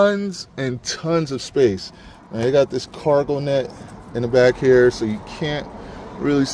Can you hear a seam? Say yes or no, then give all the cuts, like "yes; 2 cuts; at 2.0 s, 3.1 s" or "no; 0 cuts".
no; 0 cuts